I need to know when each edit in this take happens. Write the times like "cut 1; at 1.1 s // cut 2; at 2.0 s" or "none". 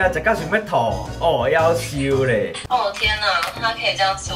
cut 1; at 2.6 s